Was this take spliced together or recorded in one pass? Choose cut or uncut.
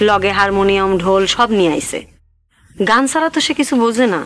uncut